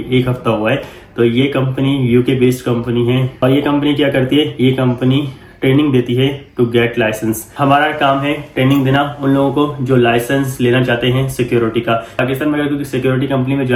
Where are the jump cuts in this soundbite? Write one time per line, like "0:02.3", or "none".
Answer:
none